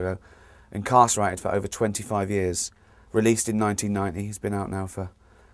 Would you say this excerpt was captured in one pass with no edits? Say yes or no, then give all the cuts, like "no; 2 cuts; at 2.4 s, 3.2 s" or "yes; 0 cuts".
yes; 0 cuts